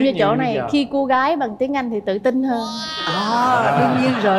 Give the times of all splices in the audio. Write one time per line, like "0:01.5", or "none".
none